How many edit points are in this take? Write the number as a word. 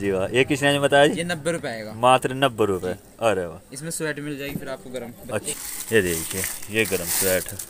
zero